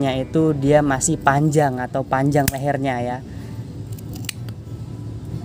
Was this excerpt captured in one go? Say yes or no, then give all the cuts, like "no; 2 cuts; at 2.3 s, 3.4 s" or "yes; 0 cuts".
yes; 0 cuts